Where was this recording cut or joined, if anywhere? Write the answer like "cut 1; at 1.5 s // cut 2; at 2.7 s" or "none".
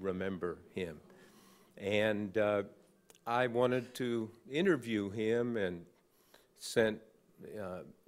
cut 1; at 2.3 s